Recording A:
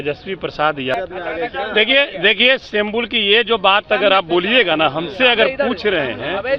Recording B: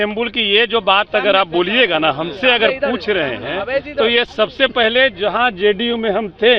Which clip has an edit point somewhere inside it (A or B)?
A